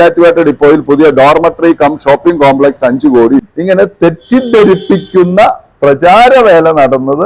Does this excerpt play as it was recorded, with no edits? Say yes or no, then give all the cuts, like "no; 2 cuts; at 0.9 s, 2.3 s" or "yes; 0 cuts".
no; 1 cut; at 3.5 s